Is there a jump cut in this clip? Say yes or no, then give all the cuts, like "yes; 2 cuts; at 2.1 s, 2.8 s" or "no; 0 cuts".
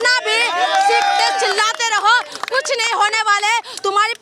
no; 0 cuts